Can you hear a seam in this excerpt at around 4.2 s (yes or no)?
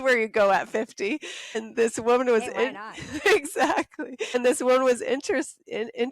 yes